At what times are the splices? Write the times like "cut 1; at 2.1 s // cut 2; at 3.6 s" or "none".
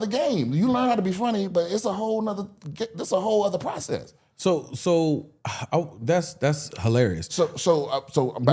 none